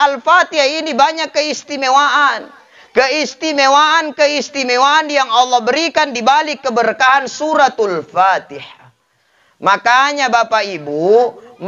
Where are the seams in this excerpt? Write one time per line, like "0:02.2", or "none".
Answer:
none